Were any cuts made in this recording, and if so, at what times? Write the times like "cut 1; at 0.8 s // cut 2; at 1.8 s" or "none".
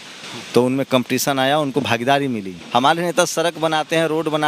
cut 1; at 2.5 s